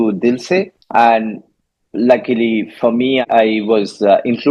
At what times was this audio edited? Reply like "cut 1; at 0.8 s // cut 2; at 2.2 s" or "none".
cut 1; at 3.2 s